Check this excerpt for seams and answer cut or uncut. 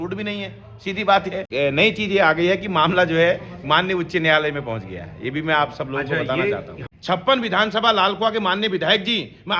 cut